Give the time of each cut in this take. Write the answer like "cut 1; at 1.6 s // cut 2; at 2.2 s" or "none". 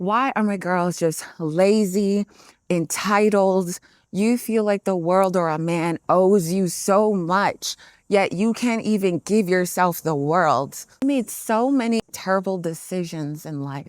cut 1; at 11.0 s // cut 2; at 12.0 s